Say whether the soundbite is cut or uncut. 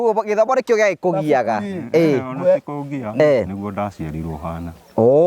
uncut